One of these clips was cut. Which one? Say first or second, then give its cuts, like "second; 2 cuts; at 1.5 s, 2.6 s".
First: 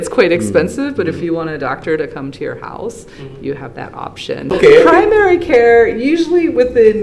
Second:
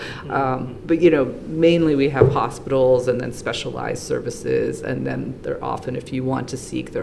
first; 1 cut; at 4.6 s